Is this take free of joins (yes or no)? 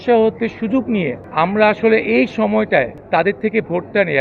no